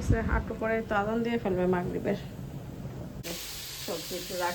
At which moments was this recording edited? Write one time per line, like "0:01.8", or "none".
0:03.2